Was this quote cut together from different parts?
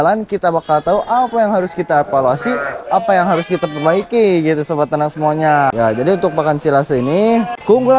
no; 0 cuts

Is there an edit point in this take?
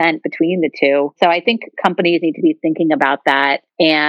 no; 0 cuts

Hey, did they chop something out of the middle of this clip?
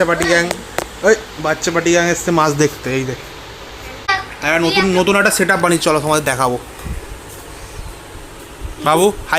yes; 1 cut; at 4.1 s

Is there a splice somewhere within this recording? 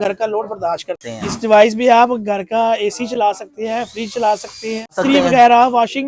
yes; 2 cuts; at 1.0 s, 5.0 s

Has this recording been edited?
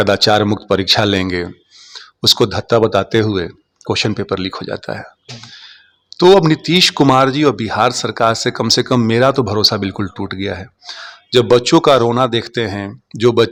no; 0 cuts

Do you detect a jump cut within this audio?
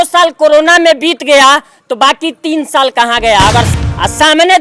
yes; 1 cut; at 3.7 s

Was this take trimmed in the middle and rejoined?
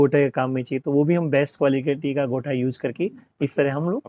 no; 0 cuts

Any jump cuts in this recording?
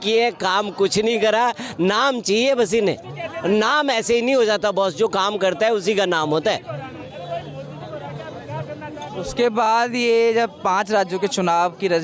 no; 0 cuts

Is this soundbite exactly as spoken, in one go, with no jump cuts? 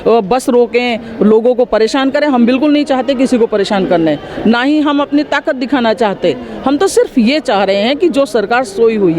yes; 0 cuts

